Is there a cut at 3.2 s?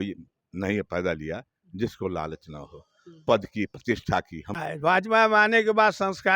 no; 1 cut; at 4.5 s

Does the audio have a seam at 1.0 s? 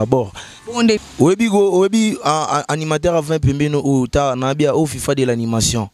yes; 1 cut; at 1.0 s

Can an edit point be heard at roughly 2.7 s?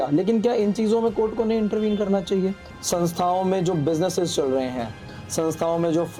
yes; 1 cut; at 2.7 s

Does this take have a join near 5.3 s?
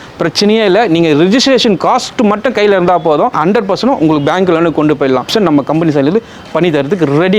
yes; 2 cuts; at 3.4 s, 5.3 s

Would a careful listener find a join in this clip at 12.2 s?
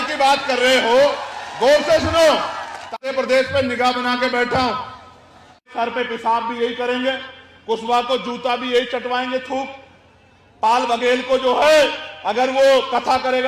no; 2 cuts; at 2.9 s, 5.7 s

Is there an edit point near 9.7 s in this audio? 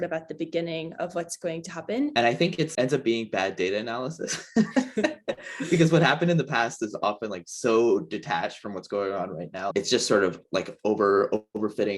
yes; 2 cuts; at 2.1 s, 9.7 s

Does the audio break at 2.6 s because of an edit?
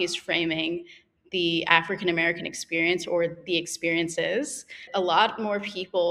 no; 1 cut; at 4.8 s

